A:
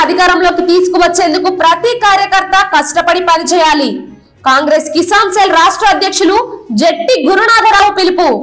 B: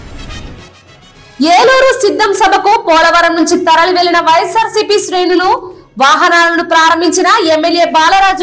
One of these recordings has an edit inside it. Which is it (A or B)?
B